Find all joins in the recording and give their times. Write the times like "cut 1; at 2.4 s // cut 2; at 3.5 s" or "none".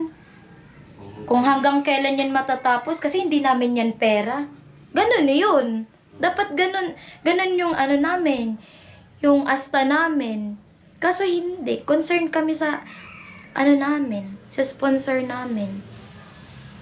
none